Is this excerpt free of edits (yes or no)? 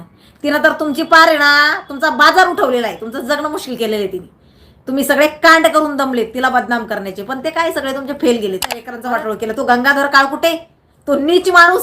no